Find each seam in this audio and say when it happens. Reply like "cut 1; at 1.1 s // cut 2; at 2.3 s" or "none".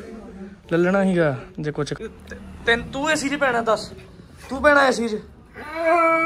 cut 1; at 1.9 s